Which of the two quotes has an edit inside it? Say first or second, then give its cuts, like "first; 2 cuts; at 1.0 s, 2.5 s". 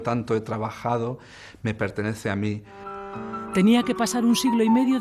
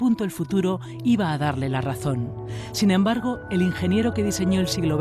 second; 1 cut; at 1.7 s